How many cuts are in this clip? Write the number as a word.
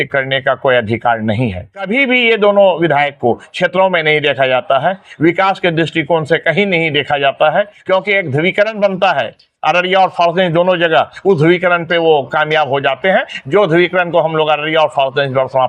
two